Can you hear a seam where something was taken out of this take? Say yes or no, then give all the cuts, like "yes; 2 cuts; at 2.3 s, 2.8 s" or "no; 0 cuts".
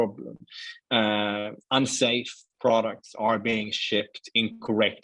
no; 0 cuts